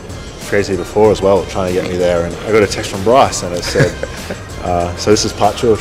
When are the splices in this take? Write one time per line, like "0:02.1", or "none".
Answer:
0:02.3